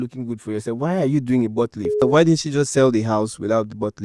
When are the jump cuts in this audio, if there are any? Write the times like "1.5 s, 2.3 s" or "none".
2.0 s

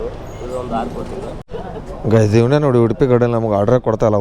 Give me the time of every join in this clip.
1.3 s

